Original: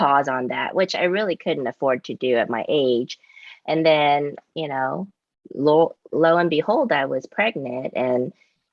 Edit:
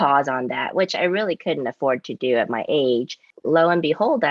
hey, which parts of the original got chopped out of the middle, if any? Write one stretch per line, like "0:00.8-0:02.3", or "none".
0:03.3-0:06.0